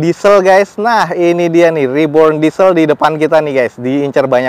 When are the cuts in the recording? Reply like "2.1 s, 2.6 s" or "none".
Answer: none